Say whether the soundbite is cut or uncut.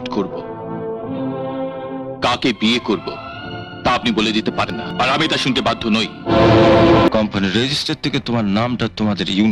cut